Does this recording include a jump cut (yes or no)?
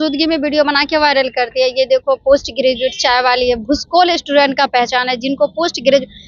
no